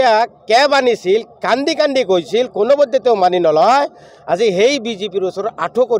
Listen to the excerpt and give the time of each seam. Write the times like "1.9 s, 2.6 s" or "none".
none